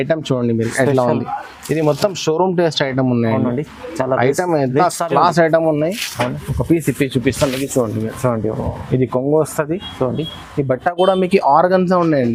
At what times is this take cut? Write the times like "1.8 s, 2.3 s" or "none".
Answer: none